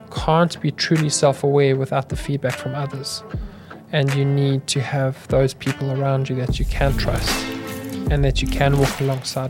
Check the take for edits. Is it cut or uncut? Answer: uncut